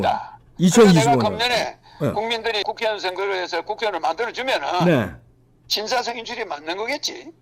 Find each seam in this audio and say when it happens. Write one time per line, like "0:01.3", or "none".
none